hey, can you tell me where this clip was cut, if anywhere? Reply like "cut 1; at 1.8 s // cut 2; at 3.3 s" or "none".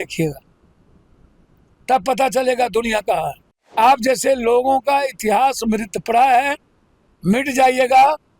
cut 1; at 3.7 s

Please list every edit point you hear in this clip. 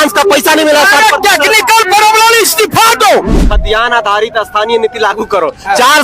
cut 1; at 3.4 s

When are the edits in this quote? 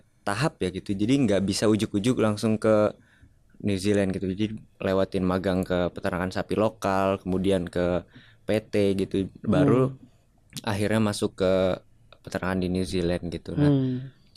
none

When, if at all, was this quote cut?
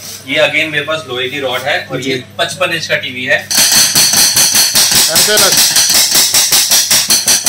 cut 1; at 3.5 s

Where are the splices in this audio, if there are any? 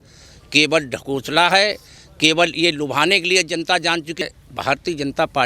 cut 1; at 4.2 s

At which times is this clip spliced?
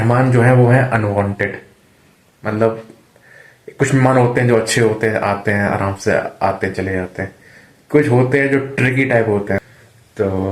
cut 1; at 9.6 s

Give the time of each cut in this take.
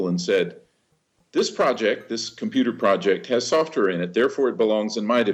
none

